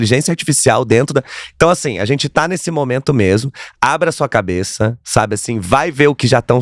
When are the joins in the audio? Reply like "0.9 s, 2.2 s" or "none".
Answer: none